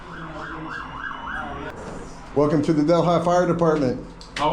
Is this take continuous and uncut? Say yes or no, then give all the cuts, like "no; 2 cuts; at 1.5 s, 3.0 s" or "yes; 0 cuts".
no; 1 cut; at 1.7 s